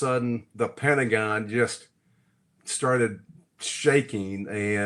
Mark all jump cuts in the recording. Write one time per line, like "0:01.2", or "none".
none